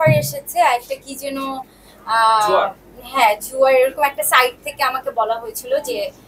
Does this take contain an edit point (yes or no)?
no